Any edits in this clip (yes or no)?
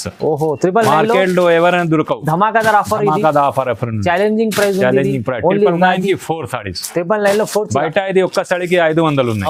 no